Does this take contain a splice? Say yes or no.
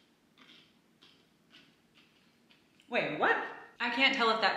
yes